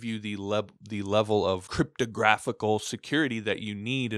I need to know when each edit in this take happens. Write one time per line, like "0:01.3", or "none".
0:01.7